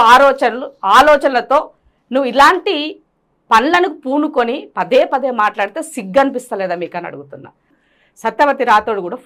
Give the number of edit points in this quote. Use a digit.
1